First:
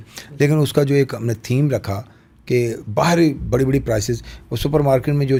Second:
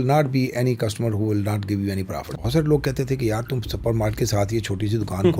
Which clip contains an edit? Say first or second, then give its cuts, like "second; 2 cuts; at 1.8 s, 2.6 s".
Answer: second; 1 cut; at 2.3 s